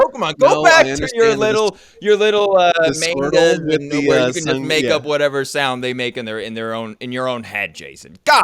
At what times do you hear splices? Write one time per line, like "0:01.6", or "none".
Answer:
none